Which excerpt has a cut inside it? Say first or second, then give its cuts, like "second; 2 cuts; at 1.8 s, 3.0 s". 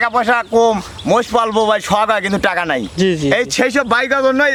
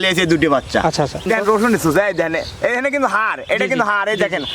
second; 1 cut; at 1.2 s